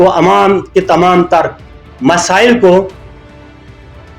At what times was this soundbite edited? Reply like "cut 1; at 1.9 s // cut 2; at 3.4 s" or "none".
none